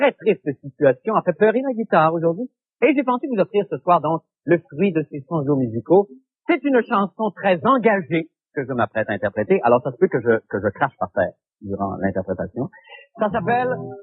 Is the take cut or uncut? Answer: uncut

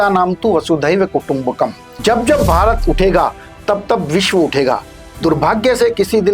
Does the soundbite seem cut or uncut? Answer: cut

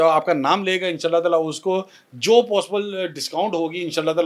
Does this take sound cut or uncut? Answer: uncut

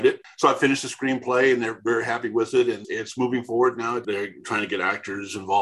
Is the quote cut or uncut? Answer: cut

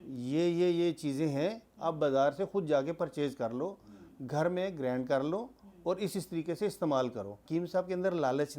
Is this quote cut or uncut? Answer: cut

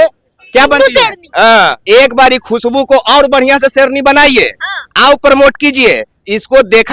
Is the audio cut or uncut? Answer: cut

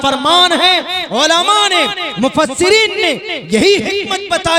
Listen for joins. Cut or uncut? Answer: uncut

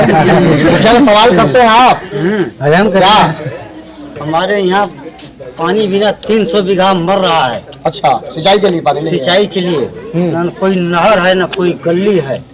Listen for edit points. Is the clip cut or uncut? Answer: uncut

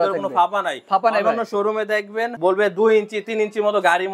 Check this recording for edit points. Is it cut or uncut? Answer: cut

